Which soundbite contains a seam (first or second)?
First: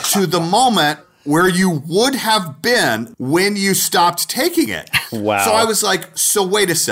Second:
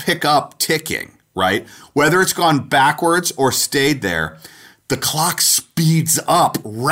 first